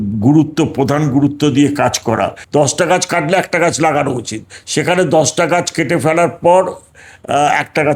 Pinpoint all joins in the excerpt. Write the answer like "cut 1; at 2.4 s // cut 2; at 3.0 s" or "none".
cut 1; at 2.4 s